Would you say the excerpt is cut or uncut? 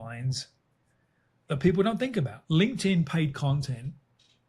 cut